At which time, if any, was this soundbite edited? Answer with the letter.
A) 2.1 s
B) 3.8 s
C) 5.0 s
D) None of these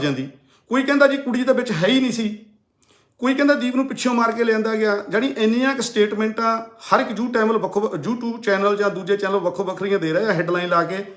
D